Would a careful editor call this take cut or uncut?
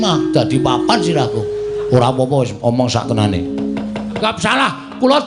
cut